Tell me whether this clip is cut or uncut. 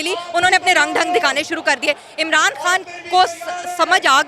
uncut